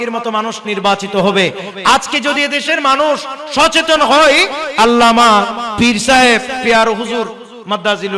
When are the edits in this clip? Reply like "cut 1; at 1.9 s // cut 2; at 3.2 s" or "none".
cut 1; at 4.6 s // cut 2; at 6.6 s

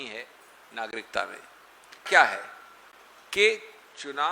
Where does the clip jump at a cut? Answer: cut 1; at 2.1 s

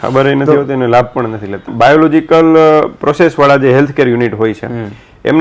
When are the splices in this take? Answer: cut 1; at 1.7 s

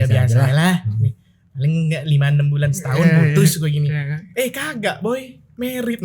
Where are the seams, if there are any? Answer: none

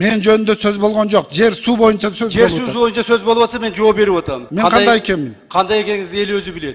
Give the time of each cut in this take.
cut 1; at 4.4 s

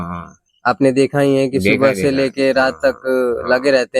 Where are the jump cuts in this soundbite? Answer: none

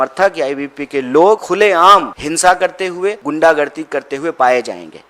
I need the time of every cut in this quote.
cut 1; at 1.7 s // cut 2; at 3.2 s

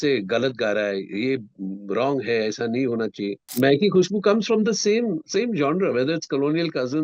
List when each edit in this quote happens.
cut 1; at 3.4 s

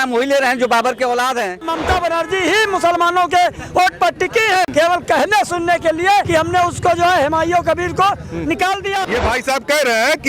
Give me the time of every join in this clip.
cut 1; at 1.7 s // cut 2; at 4.7 s // cut 3; at 6.3 s // cut 4; at 9.0 s

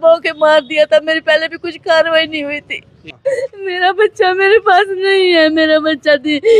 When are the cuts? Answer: cut 1; at 3.1 s

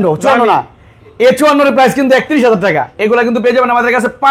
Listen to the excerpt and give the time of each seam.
cut 1; at 2.9 s

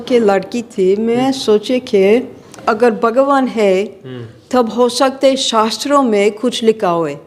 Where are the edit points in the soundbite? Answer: cut 1; at 2.5 s

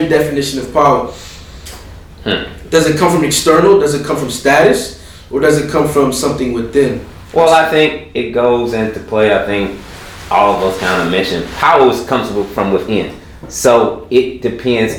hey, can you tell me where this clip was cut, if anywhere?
none

